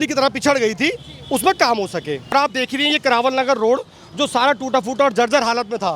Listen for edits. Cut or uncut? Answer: cut